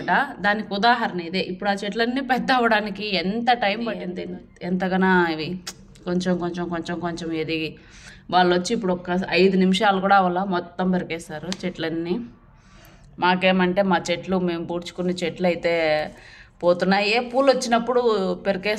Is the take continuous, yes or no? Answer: yes